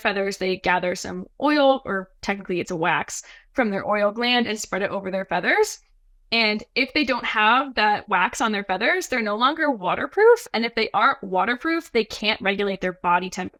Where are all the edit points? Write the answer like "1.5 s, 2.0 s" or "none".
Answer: none